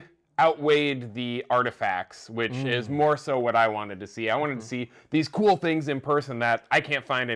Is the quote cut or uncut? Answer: uncut